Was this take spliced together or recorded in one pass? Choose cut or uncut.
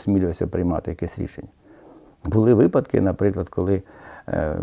uncut